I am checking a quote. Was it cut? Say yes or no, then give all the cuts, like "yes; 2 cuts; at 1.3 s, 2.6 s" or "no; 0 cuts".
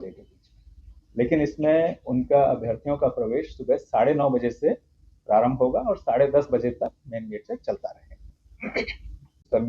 no; 0 cuts